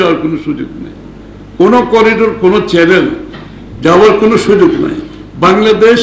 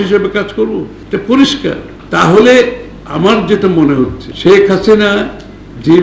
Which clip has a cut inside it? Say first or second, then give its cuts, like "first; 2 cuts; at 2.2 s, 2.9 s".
second; 3 cuts; at 1.0 s, 1.9 s, 4.2 s